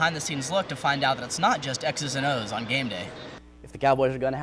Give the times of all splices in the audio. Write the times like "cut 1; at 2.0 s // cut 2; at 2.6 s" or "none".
cut 1; at 3.3 s